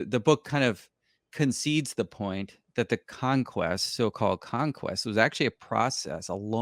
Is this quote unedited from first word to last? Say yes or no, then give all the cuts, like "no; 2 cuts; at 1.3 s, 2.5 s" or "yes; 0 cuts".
yes; 0 cuts